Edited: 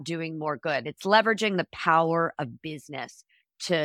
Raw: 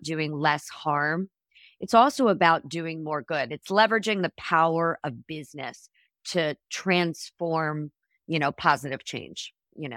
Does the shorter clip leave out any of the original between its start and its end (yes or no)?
no